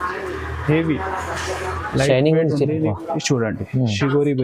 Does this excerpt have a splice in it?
yes; 1 cut; at 2.9 s

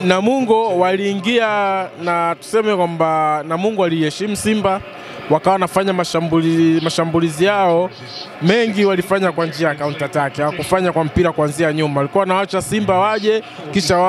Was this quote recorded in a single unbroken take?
yes; 0 cuts

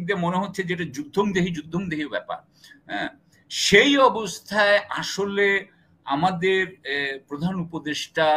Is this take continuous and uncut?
yes; 0 cuts

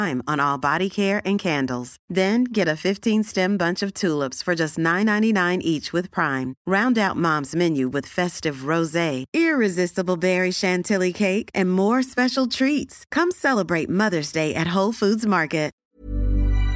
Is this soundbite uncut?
no; 1 cut; at 15.9 s

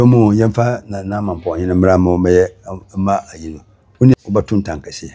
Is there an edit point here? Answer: yes; 1 cut; at 4.1 s

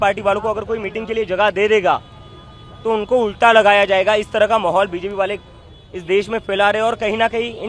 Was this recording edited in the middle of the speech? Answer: no; 0 cuts

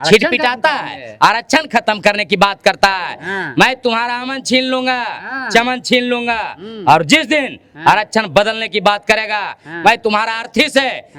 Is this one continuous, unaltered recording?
yes; 0 cuts

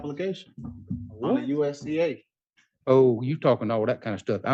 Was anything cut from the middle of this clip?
no; 0 cuts

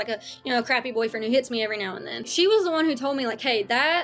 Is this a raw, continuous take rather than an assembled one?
no; 1 cut; at 2.3 s

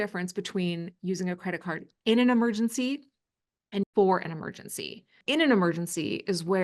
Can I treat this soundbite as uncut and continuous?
no; 2 cuts; at 3.8 s, 5.2 s

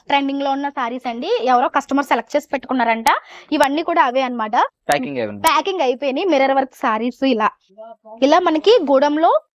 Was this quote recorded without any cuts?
yes; 0 cuts

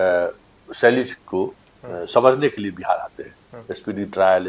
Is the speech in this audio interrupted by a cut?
no; 0 cuts

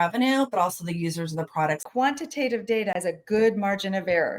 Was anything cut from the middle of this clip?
yes; 2 cuts; at 1.8 s, 3.0 s

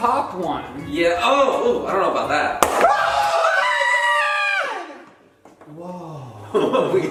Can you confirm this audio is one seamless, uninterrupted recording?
yes; 0 cuts

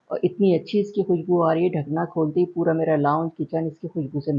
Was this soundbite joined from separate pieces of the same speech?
no; 0 cuts

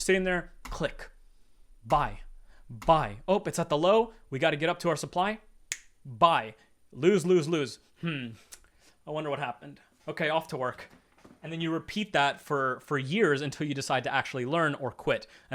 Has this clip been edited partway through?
no; 0 cuts

